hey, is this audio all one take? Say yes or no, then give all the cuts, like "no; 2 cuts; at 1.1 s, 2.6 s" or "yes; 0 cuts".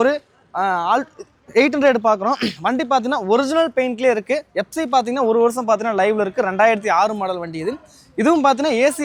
yes; 0 cuts